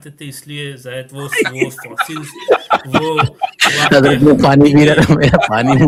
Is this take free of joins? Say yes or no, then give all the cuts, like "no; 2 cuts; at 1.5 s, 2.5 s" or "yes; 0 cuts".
yes; 0 cuts